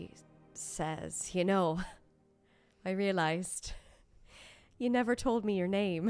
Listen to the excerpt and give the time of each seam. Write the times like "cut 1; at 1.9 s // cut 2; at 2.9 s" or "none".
none